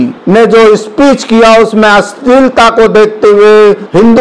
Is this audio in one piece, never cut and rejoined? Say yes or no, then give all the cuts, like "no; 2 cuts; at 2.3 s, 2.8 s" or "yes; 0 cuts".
yes; 0 cuts